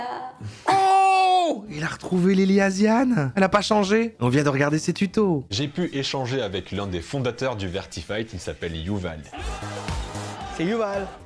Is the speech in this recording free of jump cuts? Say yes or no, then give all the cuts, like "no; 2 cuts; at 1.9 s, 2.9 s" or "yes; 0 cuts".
no; 4 cuts; at 3.3 s, 4.2 s, 5.5 s, 9.3 s